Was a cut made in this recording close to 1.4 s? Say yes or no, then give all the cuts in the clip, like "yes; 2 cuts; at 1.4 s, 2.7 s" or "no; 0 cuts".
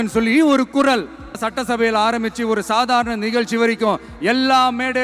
yes; 1 cut; at 1.4 s